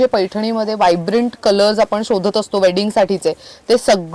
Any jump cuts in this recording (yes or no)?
no